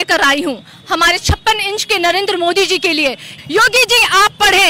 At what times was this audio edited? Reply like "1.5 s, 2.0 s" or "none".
3.4 s